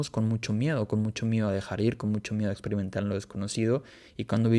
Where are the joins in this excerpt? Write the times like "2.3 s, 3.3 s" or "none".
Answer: none